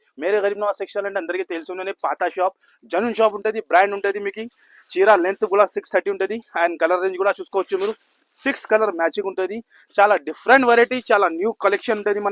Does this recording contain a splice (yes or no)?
no